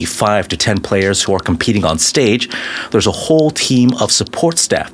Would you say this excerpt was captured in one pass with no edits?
yes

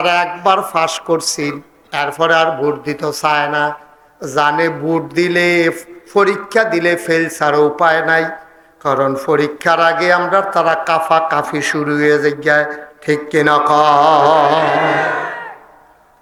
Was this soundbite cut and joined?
no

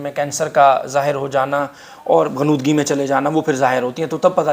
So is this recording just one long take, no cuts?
yes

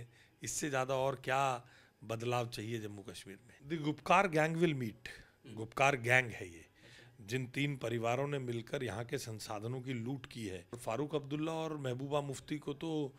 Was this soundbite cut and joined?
yes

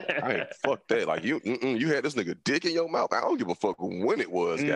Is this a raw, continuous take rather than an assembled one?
yes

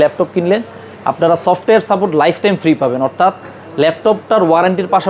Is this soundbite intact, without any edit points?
yes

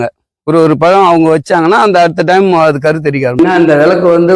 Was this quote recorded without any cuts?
no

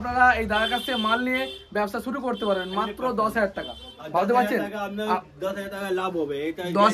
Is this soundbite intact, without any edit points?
yes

